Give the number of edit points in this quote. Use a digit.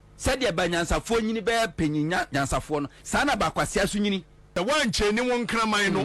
1